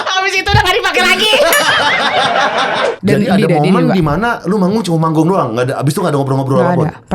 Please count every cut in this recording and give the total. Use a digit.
1